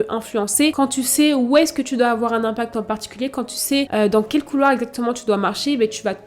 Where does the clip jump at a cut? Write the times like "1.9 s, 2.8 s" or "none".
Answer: none